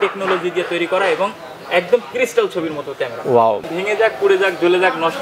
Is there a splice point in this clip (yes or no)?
yes